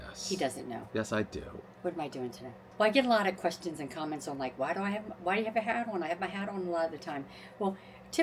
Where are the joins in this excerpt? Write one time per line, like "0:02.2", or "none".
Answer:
0:02.6